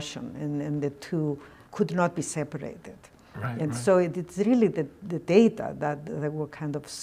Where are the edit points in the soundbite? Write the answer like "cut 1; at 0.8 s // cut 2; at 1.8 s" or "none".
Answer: cut 1; at 1.6 s